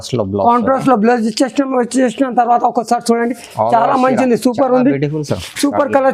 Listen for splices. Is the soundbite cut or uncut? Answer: uncut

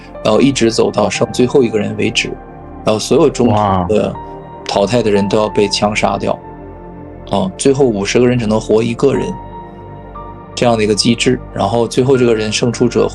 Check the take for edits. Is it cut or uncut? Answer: uncut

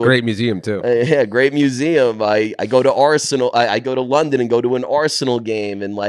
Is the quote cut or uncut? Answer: uncut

